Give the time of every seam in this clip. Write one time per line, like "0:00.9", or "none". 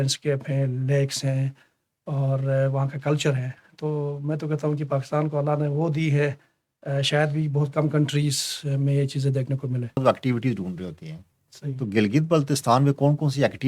0:10.0